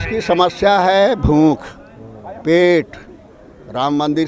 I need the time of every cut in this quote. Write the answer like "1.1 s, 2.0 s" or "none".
none